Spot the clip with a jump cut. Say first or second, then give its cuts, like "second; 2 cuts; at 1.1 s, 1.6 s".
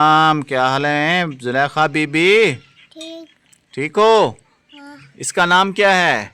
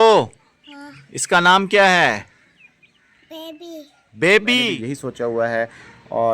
second; 1 cut; at 4.8 s